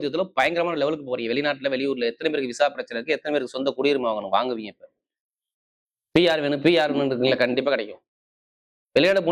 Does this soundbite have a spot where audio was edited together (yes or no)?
no